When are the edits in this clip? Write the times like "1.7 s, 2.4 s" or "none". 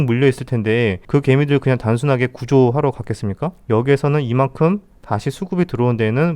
3.5 s